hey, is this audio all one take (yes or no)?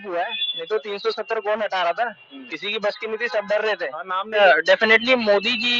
no